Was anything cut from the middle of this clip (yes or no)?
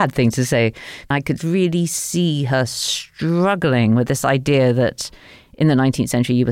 yes